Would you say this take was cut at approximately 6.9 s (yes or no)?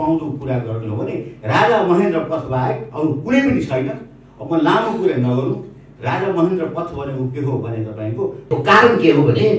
no